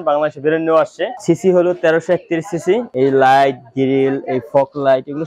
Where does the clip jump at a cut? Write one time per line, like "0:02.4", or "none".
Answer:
0:01.1
0:02.9